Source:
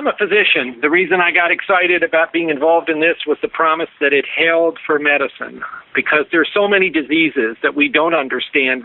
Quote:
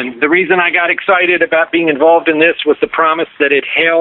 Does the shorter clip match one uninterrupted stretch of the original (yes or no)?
yes